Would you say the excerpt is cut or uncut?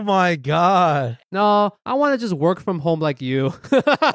cut